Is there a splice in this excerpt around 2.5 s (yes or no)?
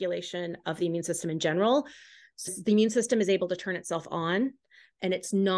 yes